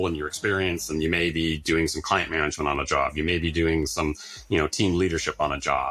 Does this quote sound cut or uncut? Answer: uncut